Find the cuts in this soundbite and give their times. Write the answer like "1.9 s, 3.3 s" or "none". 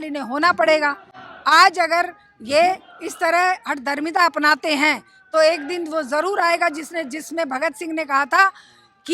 none